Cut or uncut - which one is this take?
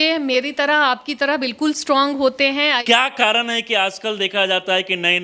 cut